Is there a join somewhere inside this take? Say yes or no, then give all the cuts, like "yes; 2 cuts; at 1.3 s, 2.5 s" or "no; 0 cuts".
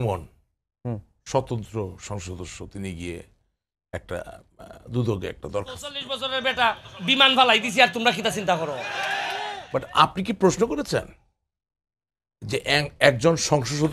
yes; 2 cuts; at 6.1 s, 9.2 s